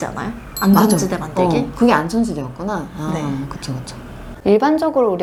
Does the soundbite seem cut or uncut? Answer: uncut